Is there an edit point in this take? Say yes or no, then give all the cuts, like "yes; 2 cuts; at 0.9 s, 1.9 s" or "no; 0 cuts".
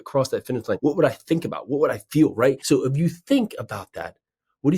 yes; 2 cuts; at 0.8 s, 2.6 s